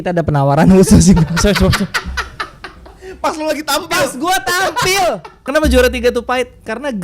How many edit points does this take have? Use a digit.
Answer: 1